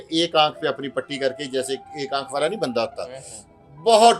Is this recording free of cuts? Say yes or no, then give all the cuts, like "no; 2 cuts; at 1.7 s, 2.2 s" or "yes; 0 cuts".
yes; 0 cuts